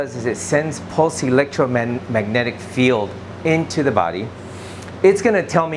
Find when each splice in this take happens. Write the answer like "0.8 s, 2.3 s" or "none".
none